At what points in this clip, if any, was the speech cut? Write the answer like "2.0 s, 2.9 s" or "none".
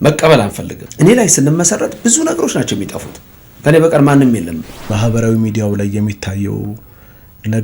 4.9 s